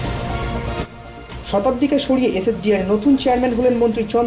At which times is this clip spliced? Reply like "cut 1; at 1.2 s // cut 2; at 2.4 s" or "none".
cut 1; at 0.9 s